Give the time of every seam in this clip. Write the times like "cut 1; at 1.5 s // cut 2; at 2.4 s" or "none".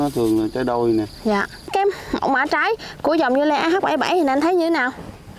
cut 1; at 1.7 s